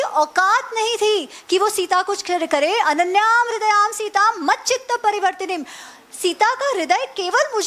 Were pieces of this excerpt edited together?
no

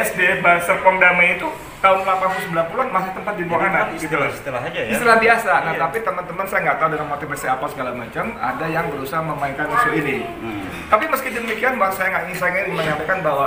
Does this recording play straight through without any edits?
yes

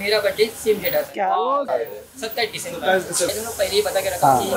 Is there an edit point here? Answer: yes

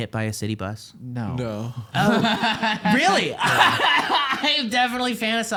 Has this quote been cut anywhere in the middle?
no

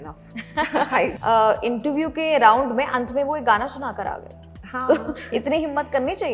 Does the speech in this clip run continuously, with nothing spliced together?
no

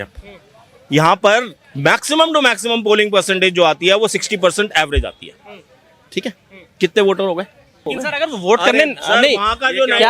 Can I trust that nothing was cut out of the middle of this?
yes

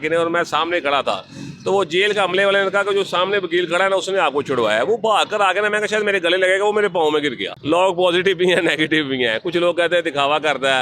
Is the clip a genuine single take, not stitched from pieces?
no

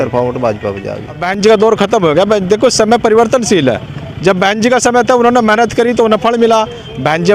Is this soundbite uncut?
no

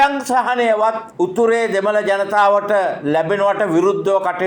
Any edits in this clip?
yes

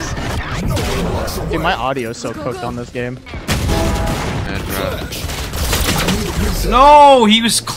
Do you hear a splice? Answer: yes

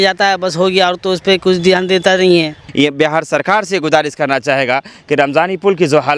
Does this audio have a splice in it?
yes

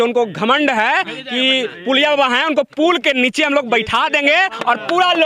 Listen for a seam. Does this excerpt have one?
no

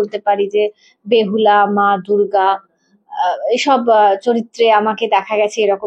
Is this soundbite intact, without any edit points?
yes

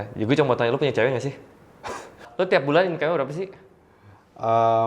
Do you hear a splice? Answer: yes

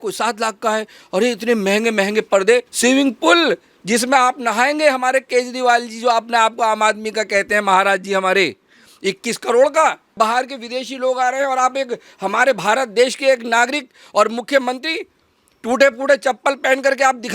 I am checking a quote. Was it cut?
yes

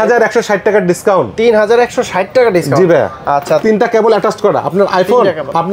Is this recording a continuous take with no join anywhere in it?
no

